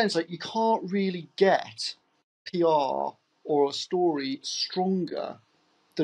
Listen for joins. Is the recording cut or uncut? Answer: uncut